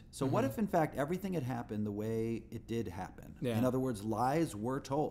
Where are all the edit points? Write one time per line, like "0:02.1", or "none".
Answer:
0:01.2